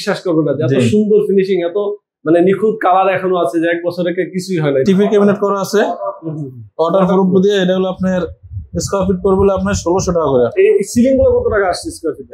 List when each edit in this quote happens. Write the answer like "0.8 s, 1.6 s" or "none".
4.8 s, 10.5 s